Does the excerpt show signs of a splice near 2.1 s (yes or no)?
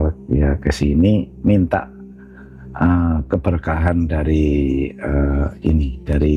no